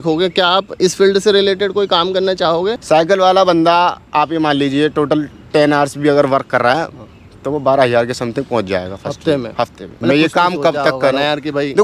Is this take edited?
yes; 2 cuts; at 2.8 s, 9.8 s

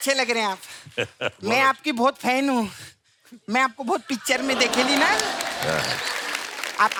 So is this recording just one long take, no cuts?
yes; 0 cuts

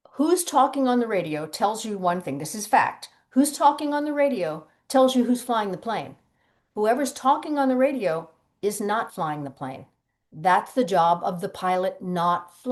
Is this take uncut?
yes; 0 cuts

